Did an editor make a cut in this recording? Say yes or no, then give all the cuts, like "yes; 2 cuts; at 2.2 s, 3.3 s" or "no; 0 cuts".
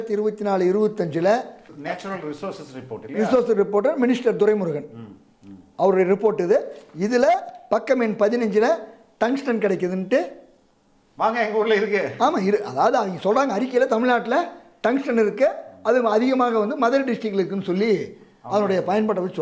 no; 0 cuts